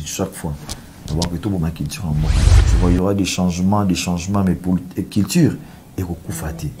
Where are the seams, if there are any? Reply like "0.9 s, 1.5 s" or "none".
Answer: 2.5 s